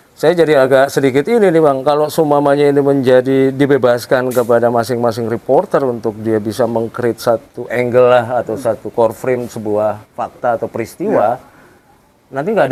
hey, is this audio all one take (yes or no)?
yes